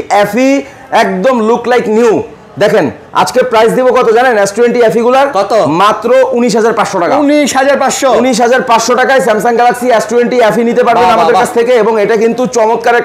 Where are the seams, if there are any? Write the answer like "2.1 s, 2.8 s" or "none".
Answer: none